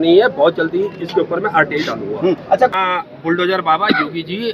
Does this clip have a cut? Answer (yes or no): yes